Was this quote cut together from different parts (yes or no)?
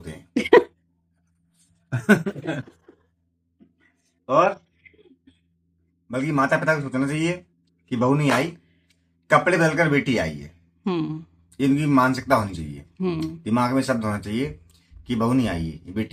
no